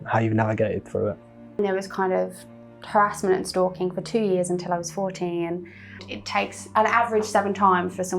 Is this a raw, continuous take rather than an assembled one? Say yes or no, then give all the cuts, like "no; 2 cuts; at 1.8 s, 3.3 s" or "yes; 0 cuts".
no; 2 cuts; at 1.6 s, 6.1 s